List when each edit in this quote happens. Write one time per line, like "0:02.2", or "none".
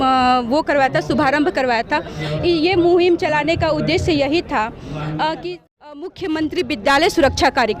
0:05.4

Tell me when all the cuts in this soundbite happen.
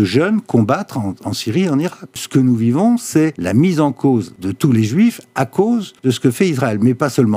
0:02.1
0:03.4
0:04.4
0:05.9

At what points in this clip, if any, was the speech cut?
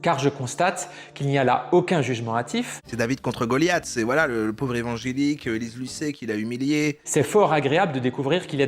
0:02.8
0:07.0

